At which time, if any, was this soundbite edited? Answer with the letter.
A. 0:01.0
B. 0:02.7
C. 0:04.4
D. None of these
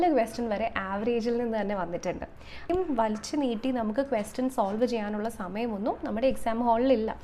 B